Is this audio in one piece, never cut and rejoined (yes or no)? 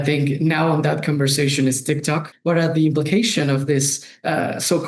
no